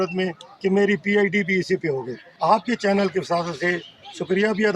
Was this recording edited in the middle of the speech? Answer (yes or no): yes